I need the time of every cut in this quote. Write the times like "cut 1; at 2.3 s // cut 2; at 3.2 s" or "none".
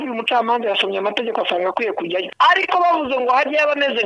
cut 1; at 2.3 s